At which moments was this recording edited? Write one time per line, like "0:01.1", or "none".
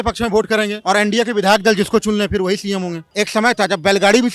0:03.0